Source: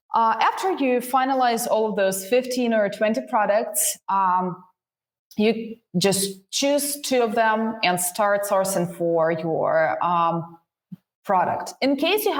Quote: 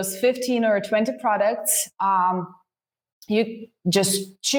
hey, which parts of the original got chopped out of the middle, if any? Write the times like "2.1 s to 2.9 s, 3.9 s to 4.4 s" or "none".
none